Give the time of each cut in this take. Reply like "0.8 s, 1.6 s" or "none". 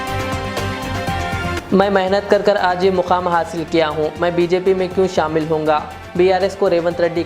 1.6 s